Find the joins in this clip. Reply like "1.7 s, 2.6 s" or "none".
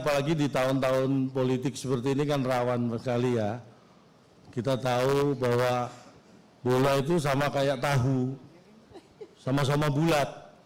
none